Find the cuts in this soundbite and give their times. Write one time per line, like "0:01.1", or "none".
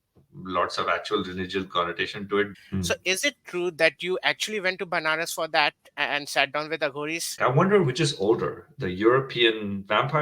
0:02.5
0:07.3